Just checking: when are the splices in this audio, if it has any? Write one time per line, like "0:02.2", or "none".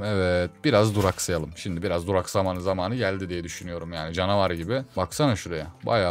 none

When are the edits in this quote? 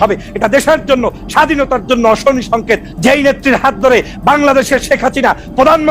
0:02.9

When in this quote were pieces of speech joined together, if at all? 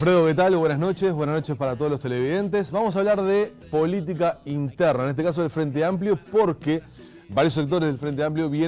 0:01.2

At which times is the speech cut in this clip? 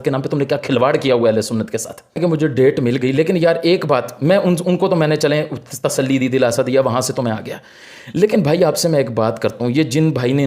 none

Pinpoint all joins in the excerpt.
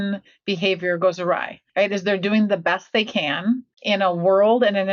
0:01.6
0:03.7

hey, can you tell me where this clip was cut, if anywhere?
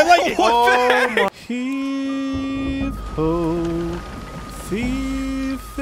0:01.3

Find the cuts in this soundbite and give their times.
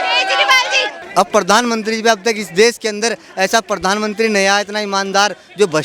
0:01.0

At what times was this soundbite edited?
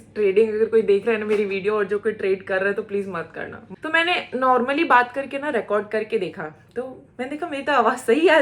0:03.6

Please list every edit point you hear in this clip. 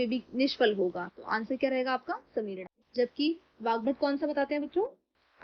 0:02.8

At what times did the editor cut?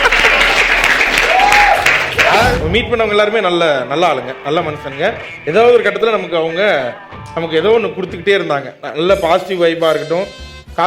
0:02.5

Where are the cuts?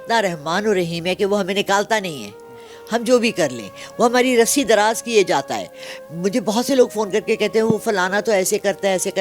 none

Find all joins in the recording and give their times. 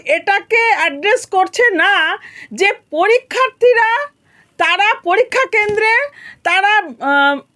none

